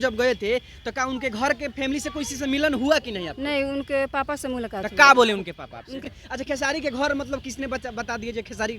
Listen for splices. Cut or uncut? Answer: cut